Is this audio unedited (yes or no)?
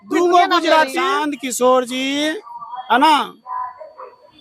no